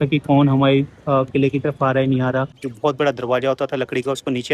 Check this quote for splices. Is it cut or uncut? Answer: cut